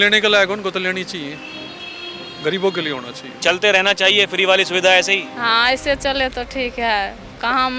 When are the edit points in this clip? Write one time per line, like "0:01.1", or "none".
0:03.2